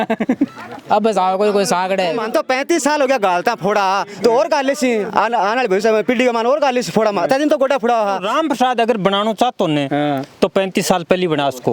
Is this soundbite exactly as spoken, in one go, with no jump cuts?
no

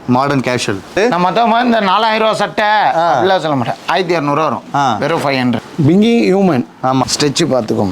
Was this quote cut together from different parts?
yes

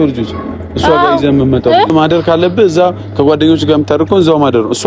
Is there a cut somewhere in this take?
yes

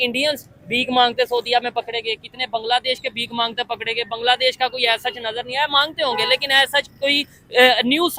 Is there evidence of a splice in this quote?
no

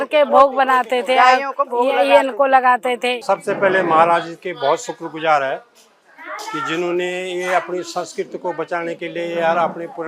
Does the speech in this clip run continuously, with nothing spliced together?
no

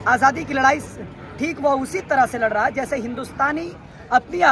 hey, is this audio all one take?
yes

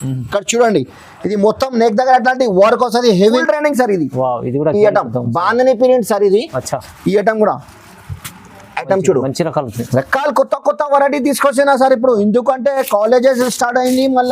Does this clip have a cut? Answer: yes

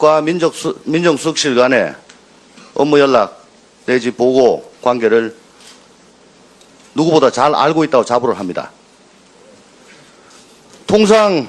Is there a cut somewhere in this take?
no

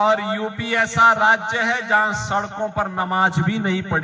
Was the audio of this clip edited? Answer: no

